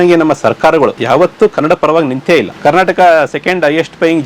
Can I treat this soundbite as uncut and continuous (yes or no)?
no